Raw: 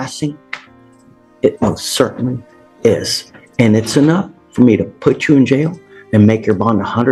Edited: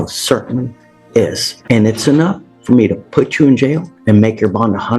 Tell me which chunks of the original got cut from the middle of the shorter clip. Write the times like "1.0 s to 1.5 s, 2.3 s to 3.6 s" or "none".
3.2 s to 3.4 s, 5.8 s to 6.0 s